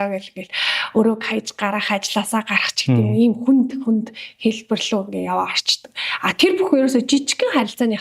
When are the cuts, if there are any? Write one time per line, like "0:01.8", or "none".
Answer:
none